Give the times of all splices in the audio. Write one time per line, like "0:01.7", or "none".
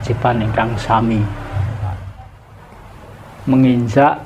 0:02.1